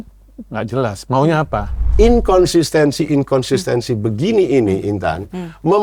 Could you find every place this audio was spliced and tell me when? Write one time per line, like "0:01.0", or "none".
0:01.8